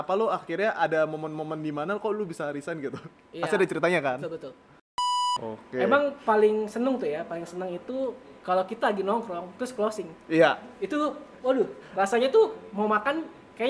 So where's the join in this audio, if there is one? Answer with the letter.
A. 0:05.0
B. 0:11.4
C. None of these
A